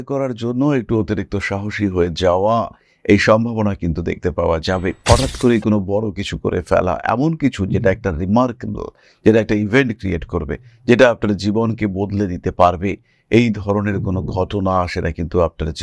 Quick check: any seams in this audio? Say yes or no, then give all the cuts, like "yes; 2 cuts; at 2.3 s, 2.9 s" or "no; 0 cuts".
no; 0 cuts